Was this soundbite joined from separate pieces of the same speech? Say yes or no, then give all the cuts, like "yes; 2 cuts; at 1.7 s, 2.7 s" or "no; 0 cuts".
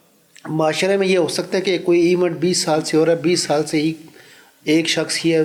no; 0 cuts